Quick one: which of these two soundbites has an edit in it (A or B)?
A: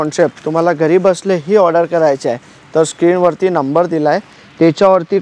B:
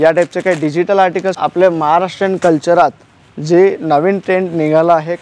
B